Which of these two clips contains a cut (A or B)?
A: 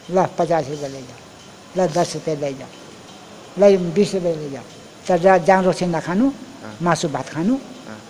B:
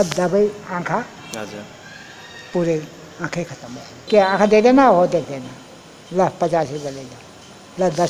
B